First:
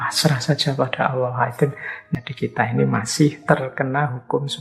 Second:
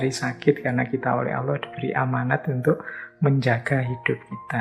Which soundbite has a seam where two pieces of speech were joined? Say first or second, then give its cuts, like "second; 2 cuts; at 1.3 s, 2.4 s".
first; 2 cuts; at 1.9 s, 3.4 s